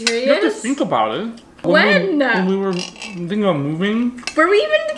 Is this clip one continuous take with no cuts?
yes; 0 cuts

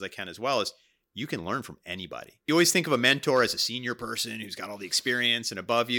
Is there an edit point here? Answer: yes; 1 cut; at 2.5 s

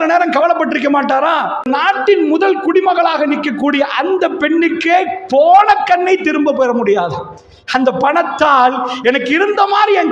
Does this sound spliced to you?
yes; 1 cut; at 1.7 s

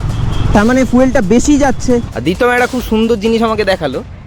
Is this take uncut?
no; 1 cut; at 2.1 s

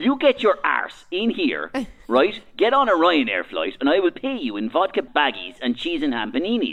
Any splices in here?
yes; 1 cut; at 5.1 s

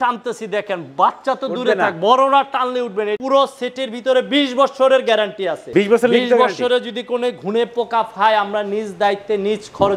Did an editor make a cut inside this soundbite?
yes; 2 cuts; at 3.2 s, 5.6 s

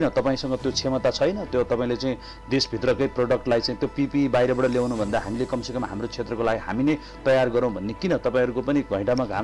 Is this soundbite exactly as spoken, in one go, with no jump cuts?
yes; 0 cuts

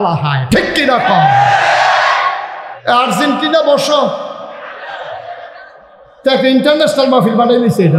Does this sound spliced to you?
yes; 1 cut; at 2.7 s

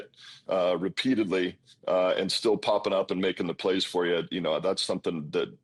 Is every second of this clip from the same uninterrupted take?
yes; 0 cuts

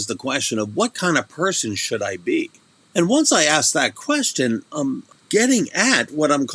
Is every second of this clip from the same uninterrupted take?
no; 2 cuts; at 2.7 s, 5.1 s

